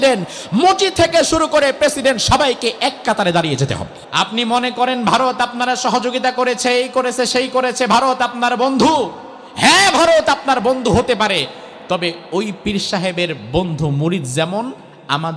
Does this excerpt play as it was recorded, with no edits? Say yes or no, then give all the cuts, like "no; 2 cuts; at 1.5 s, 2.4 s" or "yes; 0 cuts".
no; 1 cut; at 4.0 s